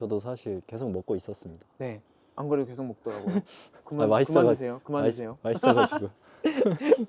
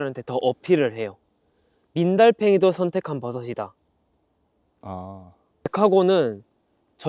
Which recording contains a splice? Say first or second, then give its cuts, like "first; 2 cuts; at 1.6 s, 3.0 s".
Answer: second; 1 cut; at 5.7 s